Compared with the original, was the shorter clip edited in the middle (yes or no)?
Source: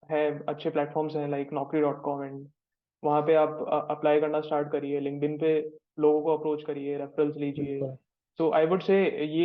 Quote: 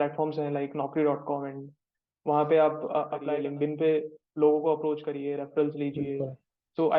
yes